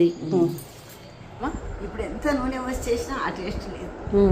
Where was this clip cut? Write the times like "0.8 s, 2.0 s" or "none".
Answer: 1.6 s

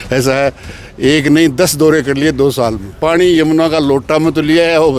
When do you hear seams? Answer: 2.9 s

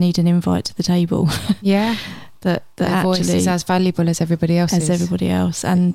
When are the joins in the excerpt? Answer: none

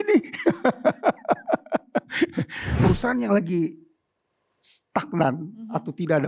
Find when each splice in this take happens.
2.6 s

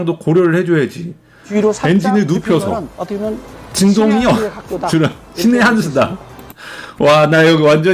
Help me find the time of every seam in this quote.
1.4 s

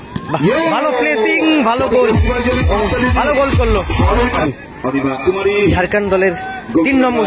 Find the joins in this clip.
4.4 s

